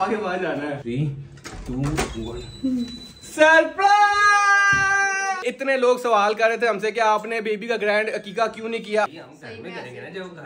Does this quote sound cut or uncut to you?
cut